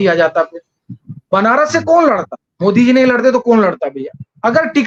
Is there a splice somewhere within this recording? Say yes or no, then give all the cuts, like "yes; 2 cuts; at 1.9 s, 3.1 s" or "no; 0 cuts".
no; 0 cuts